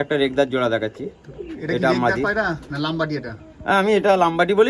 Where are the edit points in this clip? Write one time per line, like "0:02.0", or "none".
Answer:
none